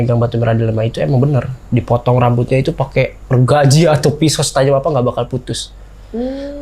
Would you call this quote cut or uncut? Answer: uncut